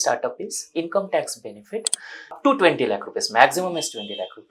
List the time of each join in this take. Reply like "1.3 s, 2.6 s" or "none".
2.4 s